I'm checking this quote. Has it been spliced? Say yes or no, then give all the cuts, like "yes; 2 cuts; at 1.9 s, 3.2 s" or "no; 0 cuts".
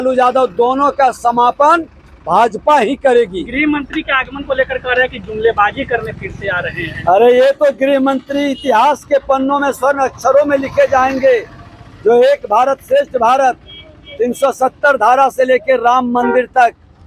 no; 0 cuts